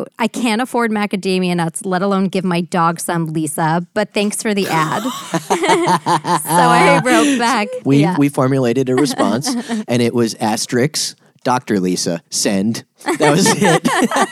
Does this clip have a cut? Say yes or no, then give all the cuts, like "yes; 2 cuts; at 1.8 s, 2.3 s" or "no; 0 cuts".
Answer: yes; 1 cut; at 7.8 s